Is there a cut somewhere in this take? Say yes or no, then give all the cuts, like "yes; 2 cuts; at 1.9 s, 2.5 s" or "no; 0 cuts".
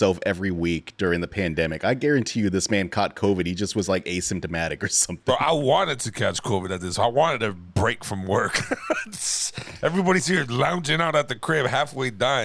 no; 0 cuts